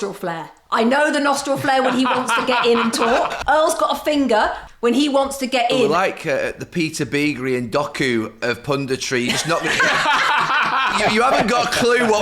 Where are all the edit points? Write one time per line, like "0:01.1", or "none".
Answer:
0:03.3
0:04.6
0:05.9
0:10.9

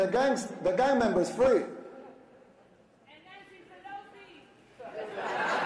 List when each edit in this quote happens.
0:02.2

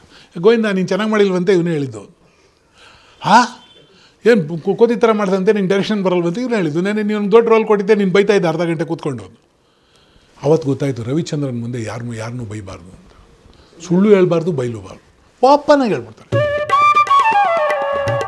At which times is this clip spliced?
0:16.2

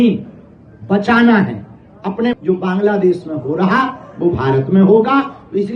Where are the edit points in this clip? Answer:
0:02.3

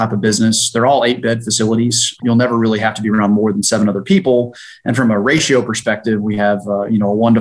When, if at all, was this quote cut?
0:02.2

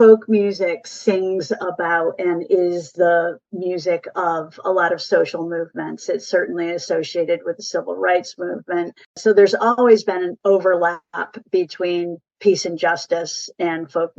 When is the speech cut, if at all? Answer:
0:09.1
0:10.4

